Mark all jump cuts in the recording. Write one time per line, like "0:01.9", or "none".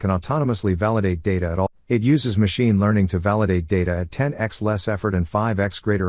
0:01.7

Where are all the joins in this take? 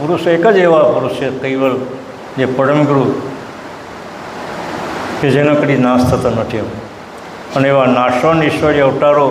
none

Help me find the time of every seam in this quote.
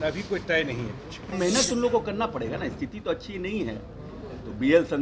0:01.3

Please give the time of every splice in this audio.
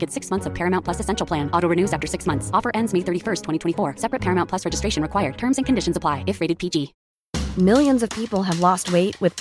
0:07.0

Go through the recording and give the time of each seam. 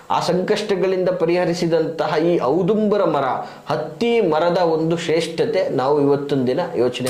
none

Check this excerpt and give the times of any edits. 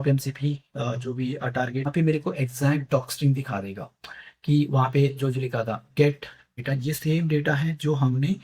0:01.9
0:06.4

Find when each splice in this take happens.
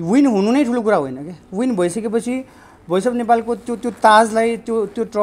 none

